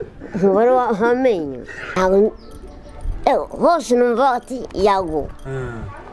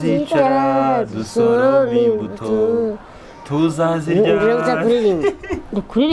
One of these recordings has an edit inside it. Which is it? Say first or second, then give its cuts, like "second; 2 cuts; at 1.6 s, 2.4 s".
first; 1 cut; at 1.9 s